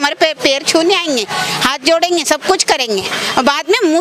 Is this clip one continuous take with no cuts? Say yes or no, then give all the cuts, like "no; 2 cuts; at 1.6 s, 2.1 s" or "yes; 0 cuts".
yes; 0 cuts